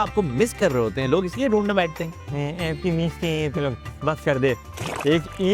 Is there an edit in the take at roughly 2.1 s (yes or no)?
no